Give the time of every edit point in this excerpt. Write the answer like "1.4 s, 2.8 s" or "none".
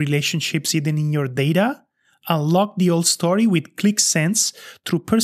none